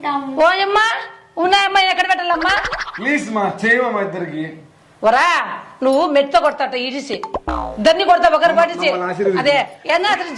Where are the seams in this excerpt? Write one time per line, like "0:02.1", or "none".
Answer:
none